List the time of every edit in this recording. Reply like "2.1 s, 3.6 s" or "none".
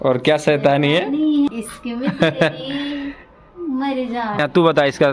1.5 s, 4.4 s